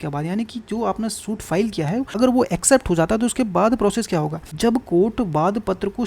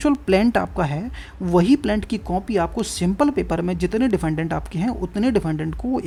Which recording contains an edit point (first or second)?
first